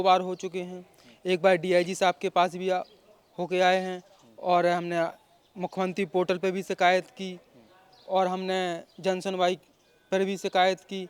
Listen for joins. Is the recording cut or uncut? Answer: uncut